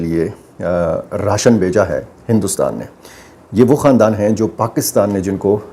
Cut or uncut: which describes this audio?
uncut